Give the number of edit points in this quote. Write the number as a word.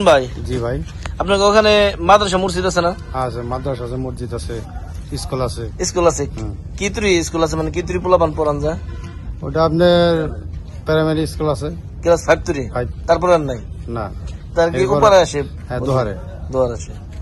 zero